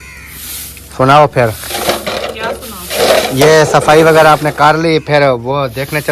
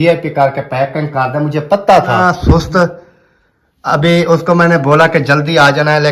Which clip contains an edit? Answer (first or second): second